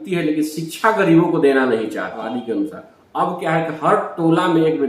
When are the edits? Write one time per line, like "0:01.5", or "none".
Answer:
0:02.2